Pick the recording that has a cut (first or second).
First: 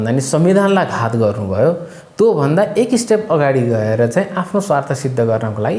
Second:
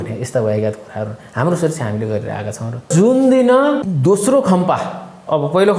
second